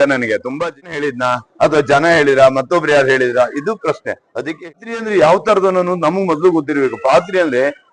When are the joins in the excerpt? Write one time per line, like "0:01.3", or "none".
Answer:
0:00.9
0:04.7